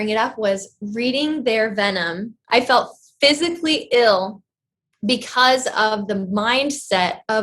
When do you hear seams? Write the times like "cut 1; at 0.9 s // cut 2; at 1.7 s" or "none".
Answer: cut 1; at 2.3 s